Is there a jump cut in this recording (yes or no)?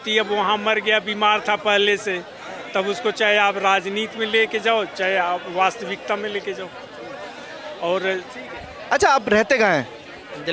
no